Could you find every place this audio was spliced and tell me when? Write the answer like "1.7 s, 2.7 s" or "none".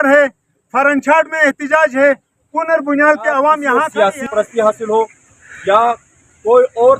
3.8 s